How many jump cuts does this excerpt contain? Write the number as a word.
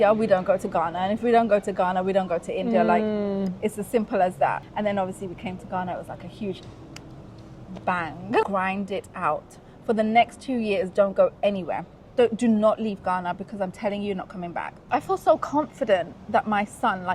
three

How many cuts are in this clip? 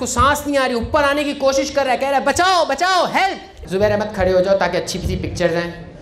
one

